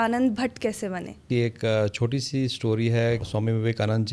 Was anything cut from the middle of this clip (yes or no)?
yes